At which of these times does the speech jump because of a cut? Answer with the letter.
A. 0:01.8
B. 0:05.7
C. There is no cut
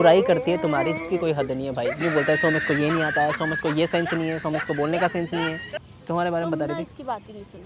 B